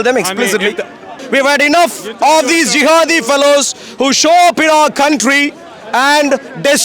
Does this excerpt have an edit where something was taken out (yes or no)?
yes